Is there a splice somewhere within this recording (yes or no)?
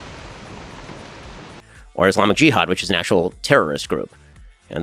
yes